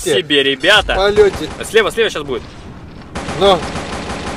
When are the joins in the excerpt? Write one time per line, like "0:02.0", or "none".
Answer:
0:01.5